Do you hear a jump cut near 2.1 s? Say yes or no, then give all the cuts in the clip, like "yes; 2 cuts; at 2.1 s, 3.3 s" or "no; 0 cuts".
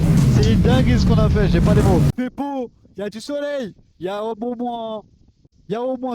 yes; 1 cut; at 2.1 s